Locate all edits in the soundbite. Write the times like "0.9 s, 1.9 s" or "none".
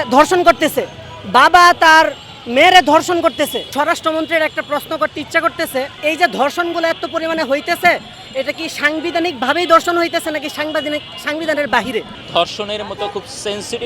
3.7 s, 5.9 s, 12.2 s